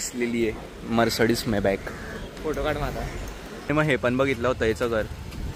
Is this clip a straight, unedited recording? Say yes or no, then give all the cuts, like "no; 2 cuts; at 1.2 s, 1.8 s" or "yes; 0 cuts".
no; 2 cuts; at 2.3 s, 3.7 s